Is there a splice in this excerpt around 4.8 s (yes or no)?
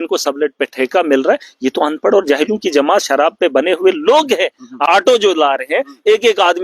yes